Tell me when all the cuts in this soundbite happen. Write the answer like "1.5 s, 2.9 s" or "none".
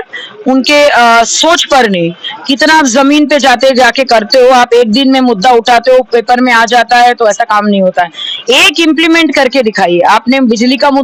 none